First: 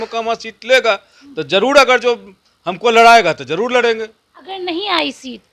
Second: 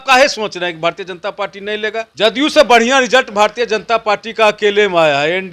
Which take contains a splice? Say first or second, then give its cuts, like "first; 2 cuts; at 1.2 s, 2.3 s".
second; 1 cut; at 2.1 s